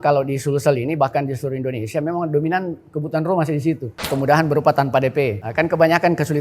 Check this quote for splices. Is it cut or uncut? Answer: cut